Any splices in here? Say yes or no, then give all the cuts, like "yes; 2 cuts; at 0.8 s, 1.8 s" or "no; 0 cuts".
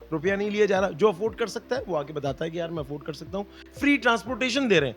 yes; 1 cut; at 3.6 s